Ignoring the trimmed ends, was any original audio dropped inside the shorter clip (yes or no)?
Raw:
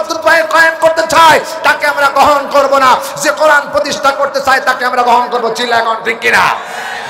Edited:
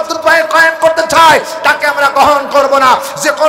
no